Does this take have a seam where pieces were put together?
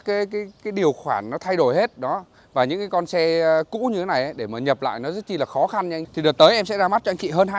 yes; 1 cut; at 6.0 s

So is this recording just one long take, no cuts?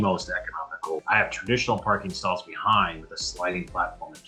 yes; 0 cuts

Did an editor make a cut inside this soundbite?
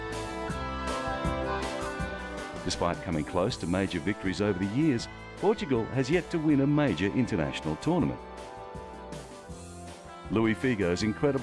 no; 0 cuts

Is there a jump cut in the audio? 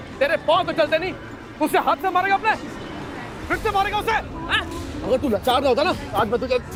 no; 0 cuts

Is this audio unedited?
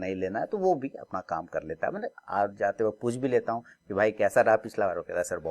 yes; 0 cuts

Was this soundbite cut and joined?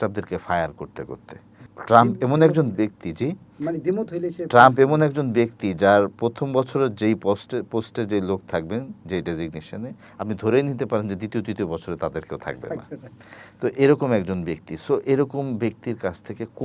no; 0 cuts

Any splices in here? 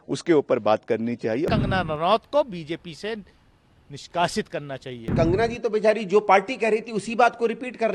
yes; 2 cuts; at 1.5 s, 5.1 s

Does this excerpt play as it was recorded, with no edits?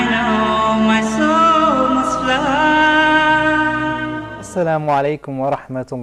no; 1 cut; at 3.8 s

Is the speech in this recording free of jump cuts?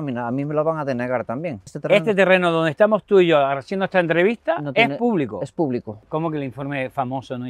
no; 2 cuts; at 1.8 s, 6.0 s

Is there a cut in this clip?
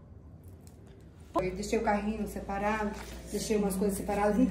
yes; 1 cut; at 1.4 s

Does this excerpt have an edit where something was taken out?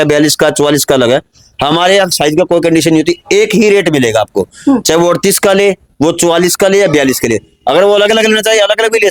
no; 0 cuts

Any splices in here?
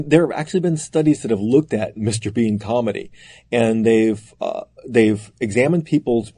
no; 0 cuts

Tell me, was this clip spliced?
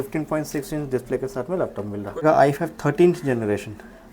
yes; 1 cut; at 2.2 s

